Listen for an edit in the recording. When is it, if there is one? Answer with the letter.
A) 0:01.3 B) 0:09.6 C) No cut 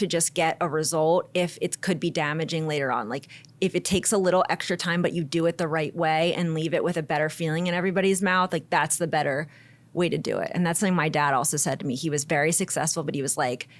C